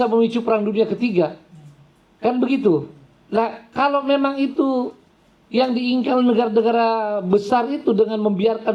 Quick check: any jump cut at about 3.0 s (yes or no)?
no